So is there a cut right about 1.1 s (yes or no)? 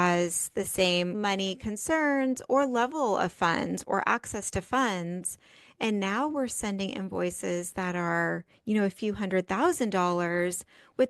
yes